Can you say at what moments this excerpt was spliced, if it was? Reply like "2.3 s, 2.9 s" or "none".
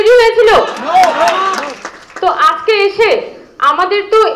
none